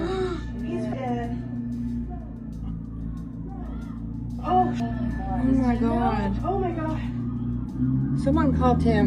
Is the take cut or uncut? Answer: cut